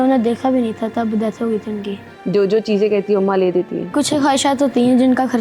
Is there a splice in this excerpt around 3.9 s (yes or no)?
yes